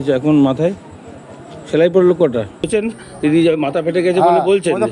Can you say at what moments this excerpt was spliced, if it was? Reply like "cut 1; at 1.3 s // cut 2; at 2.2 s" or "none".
cut 1; at 2.7 s